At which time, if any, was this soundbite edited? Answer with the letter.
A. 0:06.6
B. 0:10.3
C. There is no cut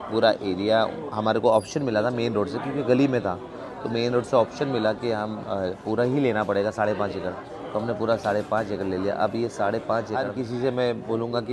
B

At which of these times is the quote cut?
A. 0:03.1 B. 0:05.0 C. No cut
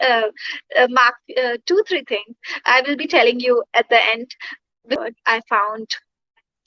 B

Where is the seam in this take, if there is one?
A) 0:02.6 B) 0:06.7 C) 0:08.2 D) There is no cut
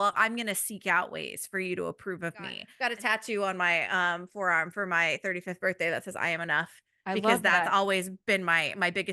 A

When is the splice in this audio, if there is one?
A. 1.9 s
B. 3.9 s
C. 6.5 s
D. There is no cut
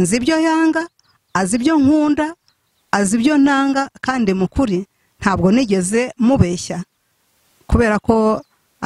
D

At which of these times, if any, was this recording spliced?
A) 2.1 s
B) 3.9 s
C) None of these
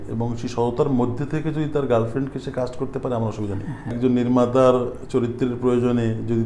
B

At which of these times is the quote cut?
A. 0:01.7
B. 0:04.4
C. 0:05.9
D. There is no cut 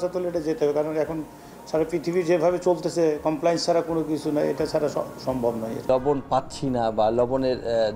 C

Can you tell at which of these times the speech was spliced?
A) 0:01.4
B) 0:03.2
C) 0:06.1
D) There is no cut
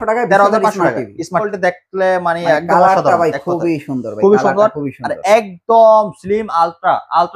A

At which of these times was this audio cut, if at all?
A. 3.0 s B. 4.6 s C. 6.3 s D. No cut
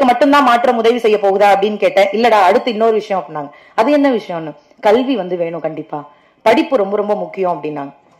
D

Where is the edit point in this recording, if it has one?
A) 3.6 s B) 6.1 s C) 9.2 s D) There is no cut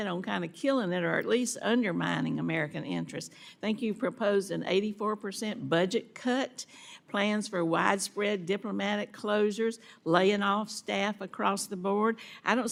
D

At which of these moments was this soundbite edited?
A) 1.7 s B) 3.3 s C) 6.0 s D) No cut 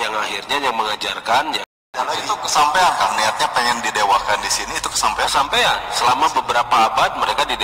A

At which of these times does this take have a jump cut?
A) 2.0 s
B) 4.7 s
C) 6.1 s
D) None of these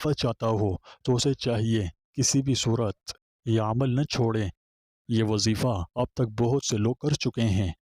B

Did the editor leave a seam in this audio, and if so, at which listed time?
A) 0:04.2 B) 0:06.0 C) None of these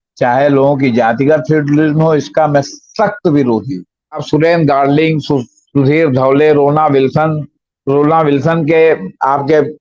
A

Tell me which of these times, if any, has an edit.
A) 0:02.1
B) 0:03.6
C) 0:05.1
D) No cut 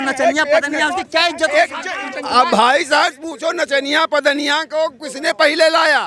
A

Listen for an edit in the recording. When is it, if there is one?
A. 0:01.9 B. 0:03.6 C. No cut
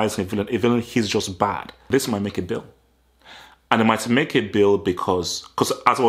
A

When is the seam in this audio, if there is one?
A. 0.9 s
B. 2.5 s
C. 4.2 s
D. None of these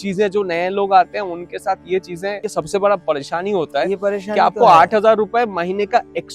B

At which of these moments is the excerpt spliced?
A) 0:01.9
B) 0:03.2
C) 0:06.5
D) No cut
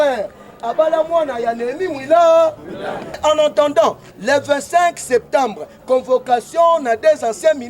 B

